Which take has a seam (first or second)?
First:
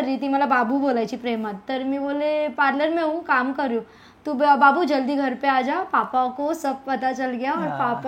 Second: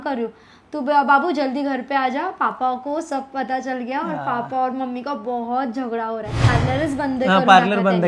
second